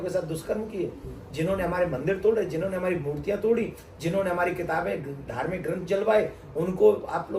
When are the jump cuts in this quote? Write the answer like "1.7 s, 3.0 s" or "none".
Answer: none